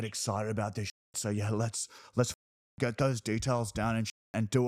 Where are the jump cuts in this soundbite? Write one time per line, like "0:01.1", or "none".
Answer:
none